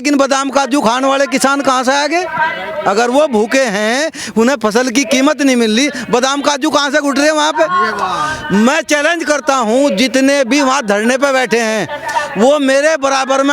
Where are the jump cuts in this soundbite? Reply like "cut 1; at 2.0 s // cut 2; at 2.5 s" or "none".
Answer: none